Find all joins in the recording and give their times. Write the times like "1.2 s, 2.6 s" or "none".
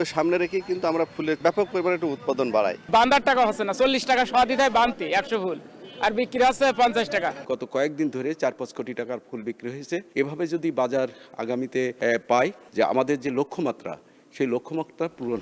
1.4 s, 2.9 s, 7.4 s, 10.1 s, 12.3 s

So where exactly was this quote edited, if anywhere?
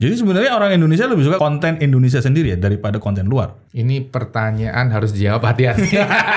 1.4 s, 3.6 s

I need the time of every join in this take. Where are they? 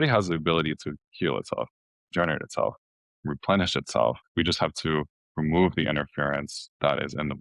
4.2 s

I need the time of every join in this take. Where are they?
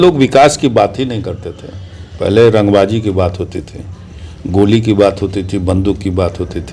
none

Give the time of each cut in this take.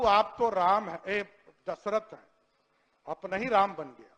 none

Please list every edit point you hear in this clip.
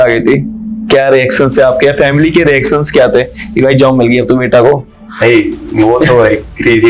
none

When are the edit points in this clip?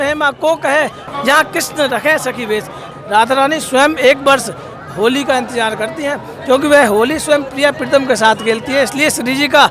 1.0 s, 2.8 s

